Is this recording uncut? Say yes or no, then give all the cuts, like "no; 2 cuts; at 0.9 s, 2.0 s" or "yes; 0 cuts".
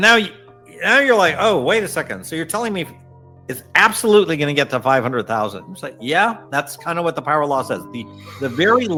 yes; 0 cuts